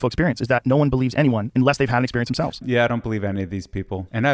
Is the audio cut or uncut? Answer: cut